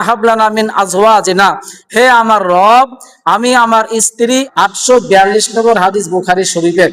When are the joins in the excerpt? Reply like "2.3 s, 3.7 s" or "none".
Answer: 4.5 s